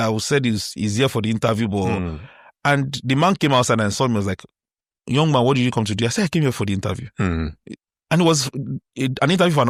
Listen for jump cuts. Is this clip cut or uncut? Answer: uncut